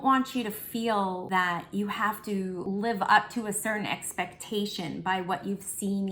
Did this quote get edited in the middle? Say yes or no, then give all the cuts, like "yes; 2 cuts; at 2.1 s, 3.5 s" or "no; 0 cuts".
yes; 2 cuts; at 1.2 s, 2.6 s